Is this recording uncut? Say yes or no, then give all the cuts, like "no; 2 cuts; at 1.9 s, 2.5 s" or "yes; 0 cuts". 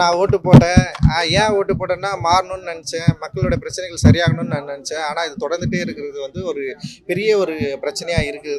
yes; 0 cuts